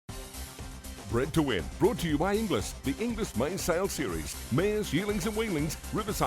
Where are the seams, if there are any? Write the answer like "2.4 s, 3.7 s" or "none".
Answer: 1.1 s